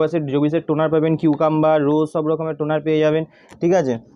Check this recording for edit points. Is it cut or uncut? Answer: uncut